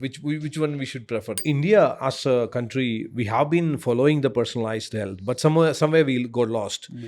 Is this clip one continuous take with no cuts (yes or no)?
no